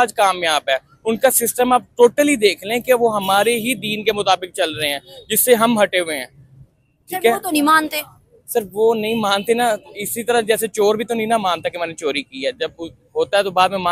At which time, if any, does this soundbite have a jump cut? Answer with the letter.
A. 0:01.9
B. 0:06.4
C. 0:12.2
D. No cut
D